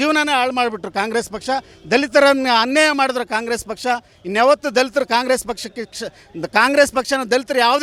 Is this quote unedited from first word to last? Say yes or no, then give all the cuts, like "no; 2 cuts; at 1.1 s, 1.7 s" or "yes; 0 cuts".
yes; 0 cuts